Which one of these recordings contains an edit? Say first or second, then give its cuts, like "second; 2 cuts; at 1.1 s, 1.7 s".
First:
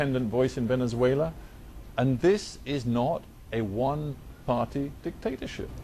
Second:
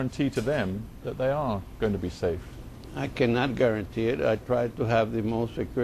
second; 1 cut; at 2.3 s